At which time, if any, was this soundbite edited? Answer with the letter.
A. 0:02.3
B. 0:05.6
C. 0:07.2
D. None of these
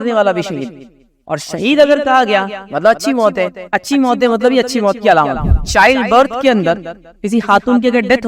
B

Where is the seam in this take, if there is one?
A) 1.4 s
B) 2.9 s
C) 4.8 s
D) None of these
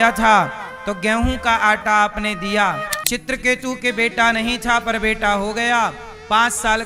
B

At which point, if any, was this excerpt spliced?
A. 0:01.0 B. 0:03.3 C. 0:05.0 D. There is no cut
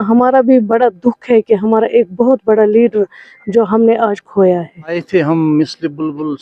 C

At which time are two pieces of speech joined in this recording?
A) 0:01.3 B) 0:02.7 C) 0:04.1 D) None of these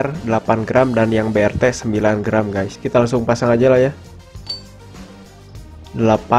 B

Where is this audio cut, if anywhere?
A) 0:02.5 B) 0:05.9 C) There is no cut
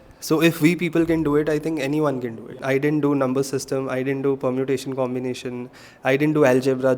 A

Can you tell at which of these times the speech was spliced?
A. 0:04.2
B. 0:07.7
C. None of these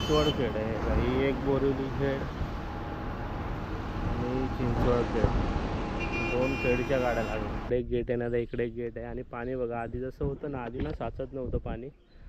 B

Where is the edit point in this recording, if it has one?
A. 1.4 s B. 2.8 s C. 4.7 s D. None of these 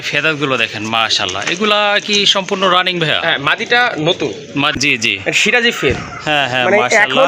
C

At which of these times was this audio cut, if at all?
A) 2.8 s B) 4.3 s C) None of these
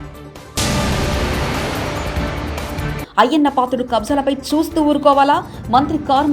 A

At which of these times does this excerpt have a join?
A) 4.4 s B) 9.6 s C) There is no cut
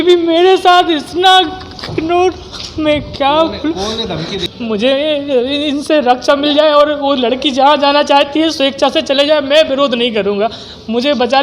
A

